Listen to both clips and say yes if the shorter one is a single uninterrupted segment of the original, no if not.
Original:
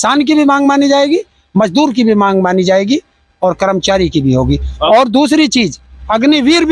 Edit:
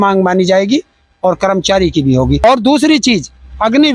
no